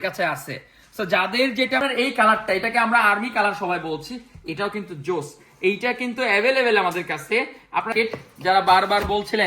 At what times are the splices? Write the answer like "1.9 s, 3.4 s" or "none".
1.8 s, 7.9 s